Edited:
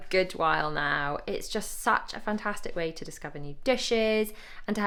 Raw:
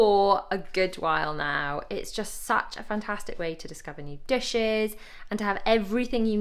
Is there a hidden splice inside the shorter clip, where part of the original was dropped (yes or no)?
no